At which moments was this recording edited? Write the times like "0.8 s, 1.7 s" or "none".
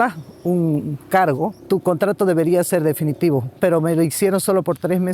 1.6 s, 3.6 s